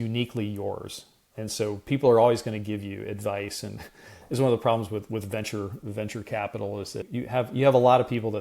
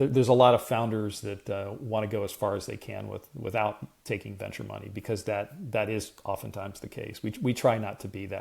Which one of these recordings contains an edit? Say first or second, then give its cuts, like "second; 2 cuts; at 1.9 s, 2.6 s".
first; 2 cuts; at 1.1 s, 7.1 s